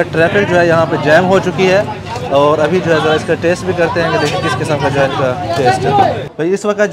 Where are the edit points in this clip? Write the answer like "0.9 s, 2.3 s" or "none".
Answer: none